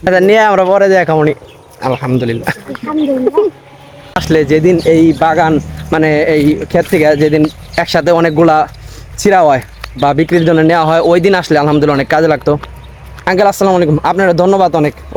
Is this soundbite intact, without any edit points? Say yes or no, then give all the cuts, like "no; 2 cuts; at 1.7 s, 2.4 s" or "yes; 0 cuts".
yes; 0 cuts